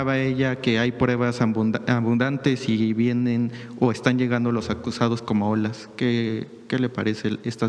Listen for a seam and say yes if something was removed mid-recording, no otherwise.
no